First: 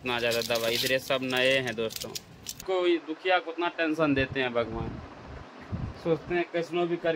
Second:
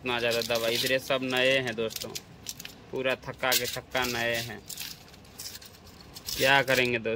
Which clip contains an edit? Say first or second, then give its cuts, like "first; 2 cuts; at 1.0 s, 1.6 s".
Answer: first; 2 cuts; at 2.5 s, 5.9 s